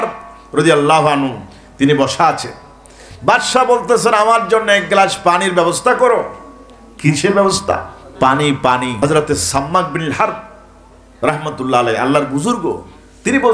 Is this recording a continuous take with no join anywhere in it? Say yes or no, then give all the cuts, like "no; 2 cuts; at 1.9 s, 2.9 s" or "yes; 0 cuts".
no; 1 cut; at 8.9 s